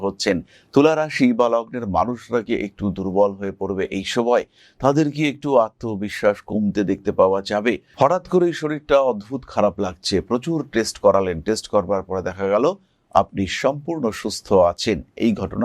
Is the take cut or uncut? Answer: cut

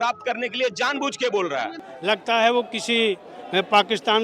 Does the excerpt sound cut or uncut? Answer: cut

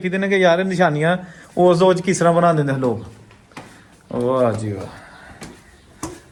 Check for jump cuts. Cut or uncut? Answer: uncut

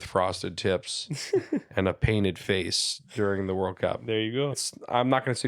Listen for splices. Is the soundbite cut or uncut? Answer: cut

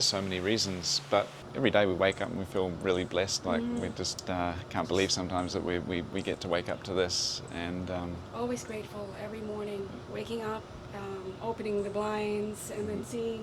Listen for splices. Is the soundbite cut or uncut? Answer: cut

